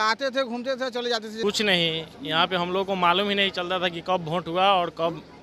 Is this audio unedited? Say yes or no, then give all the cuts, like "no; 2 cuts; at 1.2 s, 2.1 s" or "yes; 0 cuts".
no; 1 cut; at 1.3 s